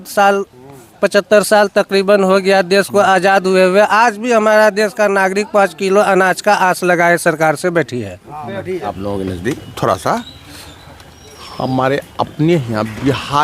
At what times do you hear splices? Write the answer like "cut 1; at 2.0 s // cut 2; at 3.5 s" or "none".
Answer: cut 1; at 8.9 s